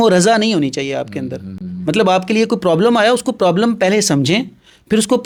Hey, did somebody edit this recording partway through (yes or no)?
no